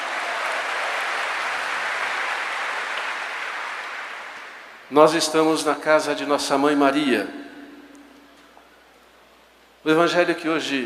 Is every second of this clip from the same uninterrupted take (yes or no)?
yes